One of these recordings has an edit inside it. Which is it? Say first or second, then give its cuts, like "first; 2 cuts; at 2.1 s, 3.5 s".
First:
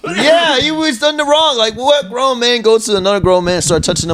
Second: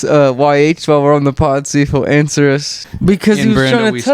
second; 1 cut; at 2.7 s